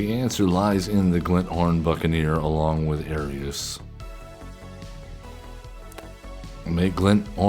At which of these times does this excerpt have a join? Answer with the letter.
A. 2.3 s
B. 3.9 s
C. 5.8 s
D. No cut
C